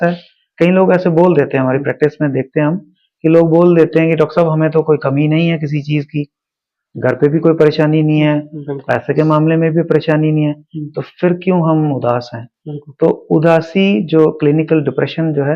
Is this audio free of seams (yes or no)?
yes